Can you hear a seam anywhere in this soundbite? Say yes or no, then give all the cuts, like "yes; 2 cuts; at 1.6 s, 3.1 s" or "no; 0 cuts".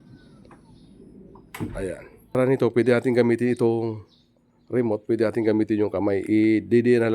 yes; 1 cut; at 2.3 s